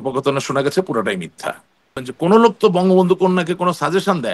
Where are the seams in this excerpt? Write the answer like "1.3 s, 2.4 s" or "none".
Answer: 2.1 s